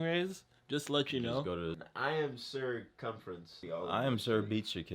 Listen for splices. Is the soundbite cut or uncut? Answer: cut